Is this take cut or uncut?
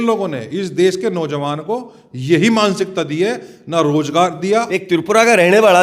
cut